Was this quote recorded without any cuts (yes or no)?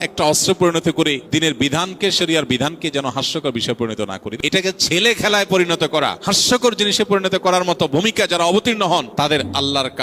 no